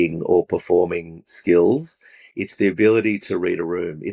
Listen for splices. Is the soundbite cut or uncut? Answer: uncut